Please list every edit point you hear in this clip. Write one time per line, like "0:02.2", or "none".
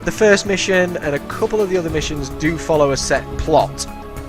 none